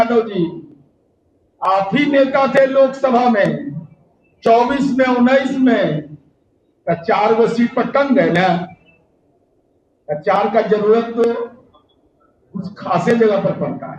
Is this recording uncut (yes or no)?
yes